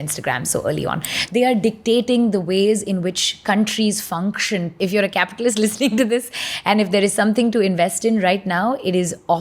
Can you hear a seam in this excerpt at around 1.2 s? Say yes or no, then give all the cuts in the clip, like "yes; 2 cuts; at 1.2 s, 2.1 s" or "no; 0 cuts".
yes; 2 cuts; at 1.2 s, 4.8 s